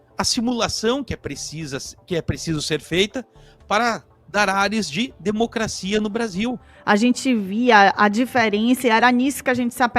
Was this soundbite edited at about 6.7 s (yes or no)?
yes